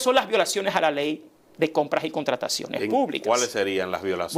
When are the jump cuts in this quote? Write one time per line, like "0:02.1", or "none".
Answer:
none